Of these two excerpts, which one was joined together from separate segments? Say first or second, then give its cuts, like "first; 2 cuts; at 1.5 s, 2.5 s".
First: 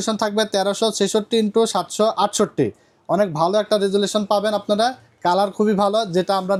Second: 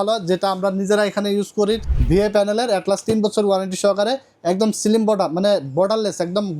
second; 1 cut; at 1.8 s